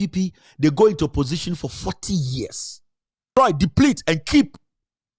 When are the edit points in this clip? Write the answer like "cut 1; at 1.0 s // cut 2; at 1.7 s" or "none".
cut 1; at 3.2 s